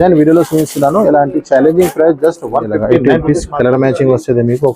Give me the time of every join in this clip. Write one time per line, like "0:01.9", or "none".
0:02.9